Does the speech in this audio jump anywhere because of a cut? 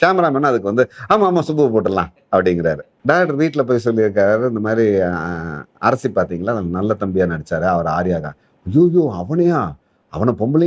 yes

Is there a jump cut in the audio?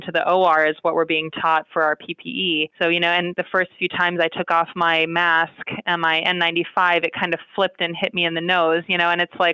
yes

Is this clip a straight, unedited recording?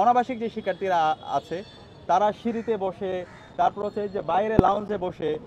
yes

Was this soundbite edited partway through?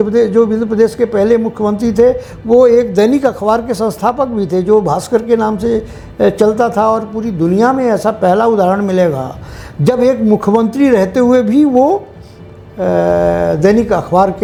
no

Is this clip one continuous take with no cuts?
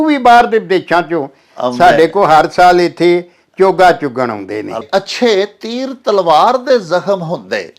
no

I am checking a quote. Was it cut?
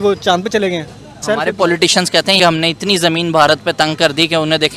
yes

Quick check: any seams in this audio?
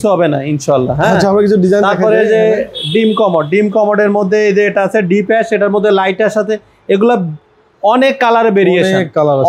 no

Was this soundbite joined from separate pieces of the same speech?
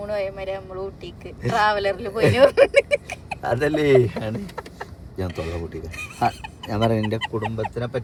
no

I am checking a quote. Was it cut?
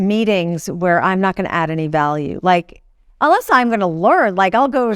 no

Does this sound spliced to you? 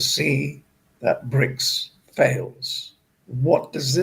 no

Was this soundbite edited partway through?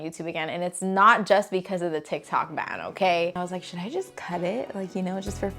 yes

